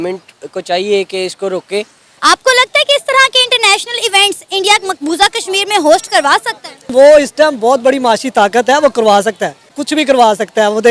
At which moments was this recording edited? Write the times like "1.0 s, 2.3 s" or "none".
2.0 s, 9.7 s